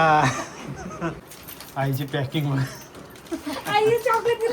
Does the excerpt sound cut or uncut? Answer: cut